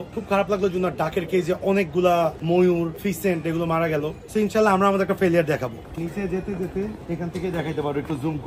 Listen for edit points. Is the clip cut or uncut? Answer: cut